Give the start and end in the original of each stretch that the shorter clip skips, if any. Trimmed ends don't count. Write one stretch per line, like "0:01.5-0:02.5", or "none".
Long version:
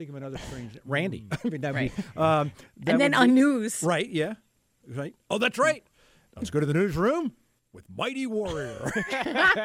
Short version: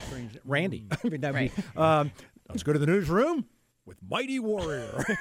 0:02.6-0:06.1